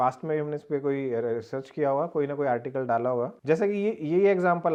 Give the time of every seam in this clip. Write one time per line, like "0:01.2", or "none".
none

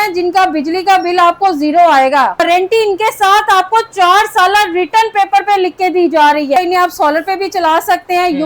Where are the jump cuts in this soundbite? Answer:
0:02.4
0:06.6

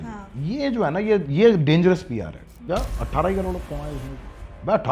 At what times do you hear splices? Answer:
0:02.5

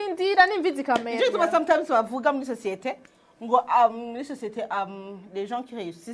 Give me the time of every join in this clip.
none

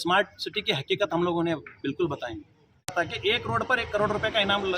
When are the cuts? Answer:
0:02.9

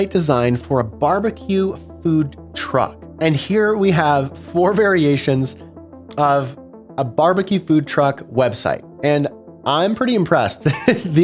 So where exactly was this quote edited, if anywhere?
0:03.0

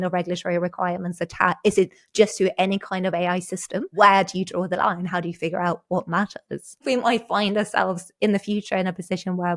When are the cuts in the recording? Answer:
0:03.9
0:06.8

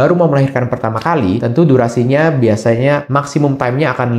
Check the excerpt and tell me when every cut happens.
0:01.4
0:03.1

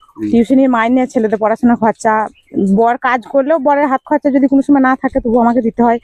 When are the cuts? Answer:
none

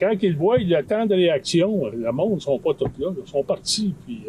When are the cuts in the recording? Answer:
none

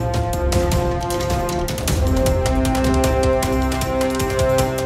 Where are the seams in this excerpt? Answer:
none

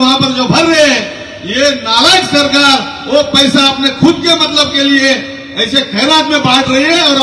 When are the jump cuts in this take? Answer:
none

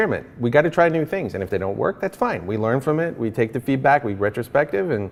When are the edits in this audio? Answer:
none

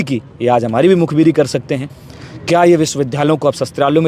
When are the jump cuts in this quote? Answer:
0:02.0

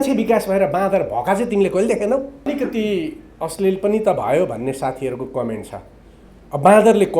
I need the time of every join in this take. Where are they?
0:02.5

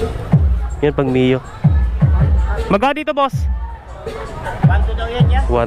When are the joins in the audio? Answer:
none

